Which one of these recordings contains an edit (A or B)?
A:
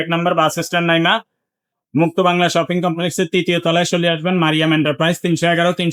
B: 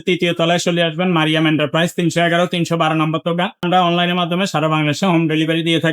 B